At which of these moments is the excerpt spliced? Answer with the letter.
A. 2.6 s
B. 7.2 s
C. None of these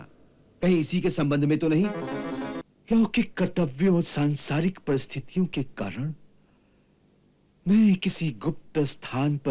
A